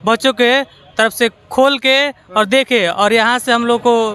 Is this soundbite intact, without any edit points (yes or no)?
yes